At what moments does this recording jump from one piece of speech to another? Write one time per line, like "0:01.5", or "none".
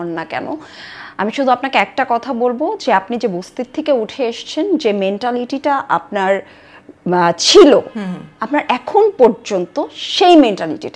none